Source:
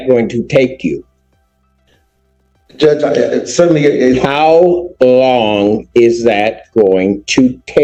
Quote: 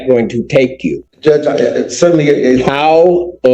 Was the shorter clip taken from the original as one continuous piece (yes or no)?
no